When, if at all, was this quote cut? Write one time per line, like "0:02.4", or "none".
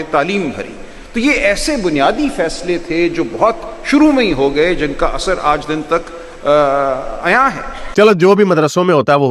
0:07.7